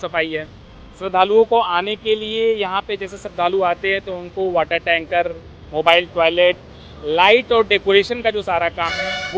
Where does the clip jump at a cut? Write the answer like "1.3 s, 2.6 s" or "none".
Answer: none